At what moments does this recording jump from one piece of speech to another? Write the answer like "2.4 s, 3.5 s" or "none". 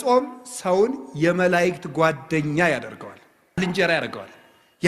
3.6 s